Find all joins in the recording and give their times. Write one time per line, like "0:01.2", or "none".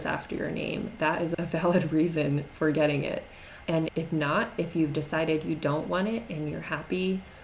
0:01.3
0:03.6

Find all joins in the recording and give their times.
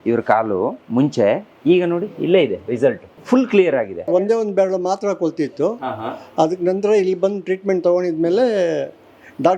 0:03.1
0:04.1

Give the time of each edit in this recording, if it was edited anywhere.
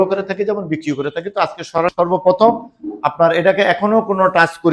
0:01.8

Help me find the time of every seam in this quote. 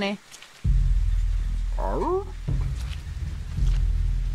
none

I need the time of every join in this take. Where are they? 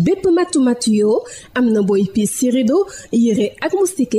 none

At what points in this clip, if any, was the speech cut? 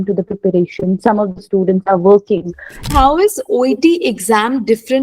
0:02.9

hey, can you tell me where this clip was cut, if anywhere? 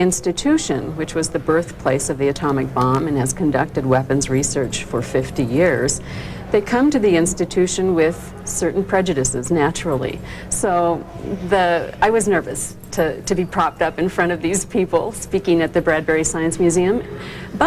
none

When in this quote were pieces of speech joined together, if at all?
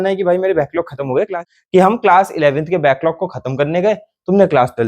0:01.3

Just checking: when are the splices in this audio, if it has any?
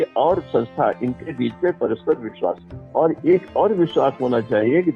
0:02.7

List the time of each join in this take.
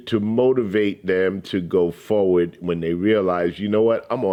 none

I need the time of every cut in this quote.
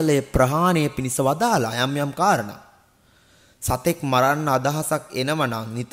none

